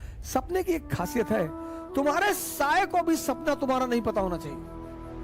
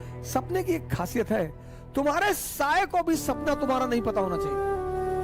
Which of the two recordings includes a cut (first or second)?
second